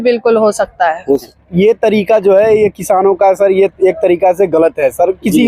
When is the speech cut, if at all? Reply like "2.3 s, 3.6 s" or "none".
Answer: 1.4 s